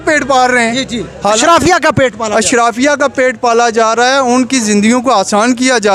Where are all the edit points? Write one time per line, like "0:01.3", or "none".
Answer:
none